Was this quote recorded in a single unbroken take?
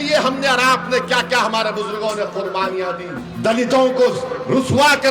no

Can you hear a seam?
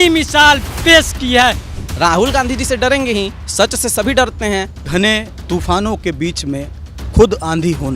yes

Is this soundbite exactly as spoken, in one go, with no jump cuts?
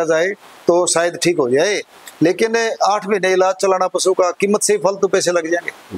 yes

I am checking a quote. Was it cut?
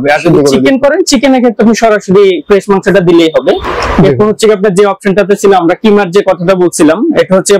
no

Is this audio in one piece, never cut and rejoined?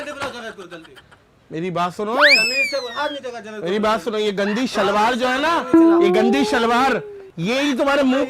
yes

